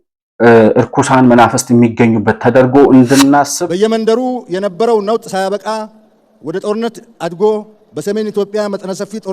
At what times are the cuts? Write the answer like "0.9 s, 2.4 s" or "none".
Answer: 3.6 s